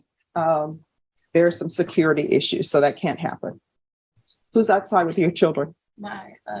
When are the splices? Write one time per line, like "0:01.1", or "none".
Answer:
none